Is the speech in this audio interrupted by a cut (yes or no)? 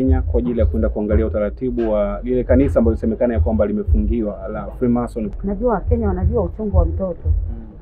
yes